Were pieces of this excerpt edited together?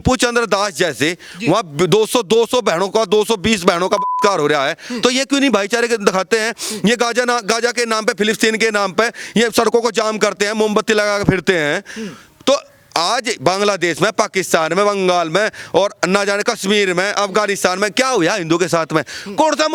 no; 0 cuts

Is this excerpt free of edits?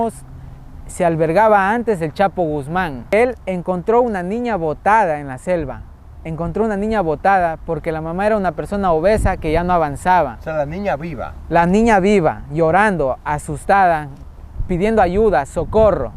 no; 1 cut; at 3.1 s

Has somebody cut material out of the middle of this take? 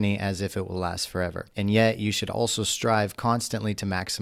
yes; 1 cut; at 1.4 s

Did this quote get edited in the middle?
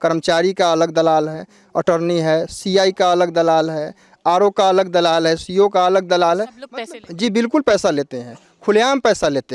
no; 0 cuts

